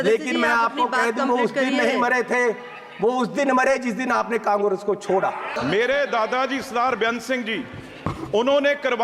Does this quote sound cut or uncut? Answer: cut